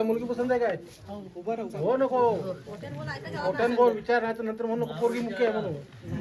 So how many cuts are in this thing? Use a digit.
0